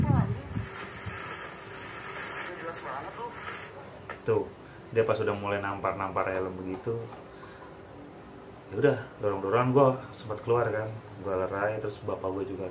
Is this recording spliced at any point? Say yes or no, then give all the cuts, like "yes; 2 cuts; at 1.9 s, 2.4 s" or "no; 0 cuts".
no; 0 cuts